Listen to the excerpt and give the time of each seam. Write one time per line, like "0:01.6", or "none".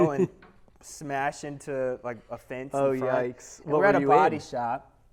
none